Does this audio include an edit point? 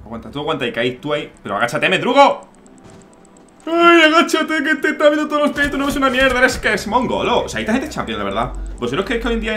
no; 0 cuts

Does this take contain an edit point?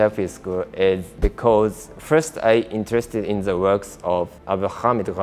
yes; 2 cuts; at 1.1 s, 4.4 s

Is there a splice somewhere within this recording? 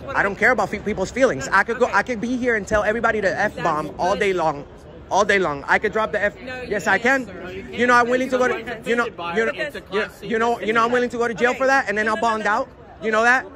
no; 0 cuts

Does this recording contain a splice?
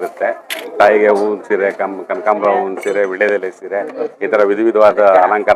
no; 0 cuts

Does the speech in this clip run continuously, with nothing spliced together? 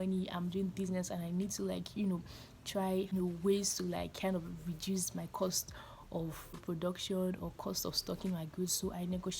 no; 2 cuts; at 3.1 s, 6.6 s

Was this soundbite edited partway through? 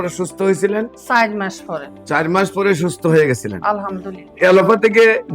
yes; 1 cut; at 4.3 s

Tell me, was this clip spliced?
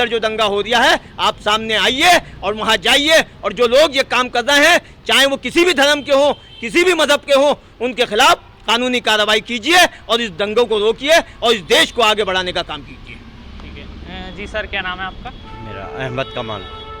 no; 0 cuts

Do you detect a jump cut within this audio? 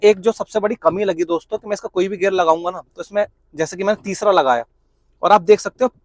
no; 0 cuts

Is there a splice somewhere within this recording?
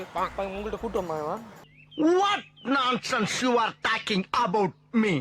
yes; 1 cut; at 1.4 s

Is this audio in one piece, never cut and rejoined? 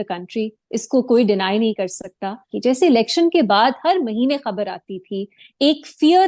no; 1 cut; at 2.5 s

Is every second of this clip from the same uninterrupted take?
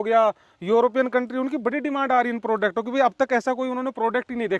yes; 0 cuts

